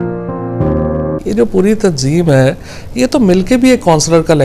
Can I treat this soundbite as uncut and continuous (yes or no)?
no